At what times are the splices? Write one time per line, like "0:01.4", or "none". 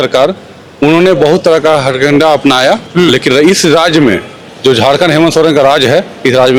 none